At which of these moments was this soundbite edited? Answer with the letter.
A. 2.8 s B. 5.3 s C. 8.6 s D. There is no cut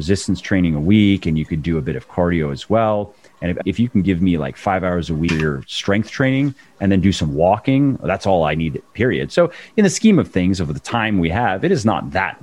B